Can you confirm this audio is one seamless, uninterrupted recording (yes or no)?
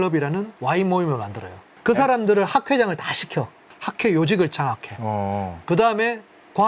no